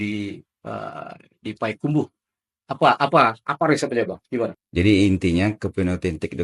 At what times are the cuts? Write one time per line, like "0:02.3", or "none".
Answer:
0:04.6